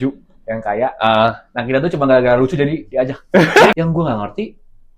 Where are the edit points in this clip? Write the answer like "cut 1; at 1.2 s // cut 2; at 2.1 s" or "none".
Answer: cut 1; at 3.7 s